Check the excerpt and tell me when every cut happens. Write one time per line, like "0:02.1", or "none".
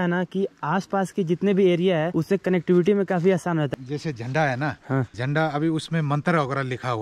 0:02.1
0:03.7
0:05.1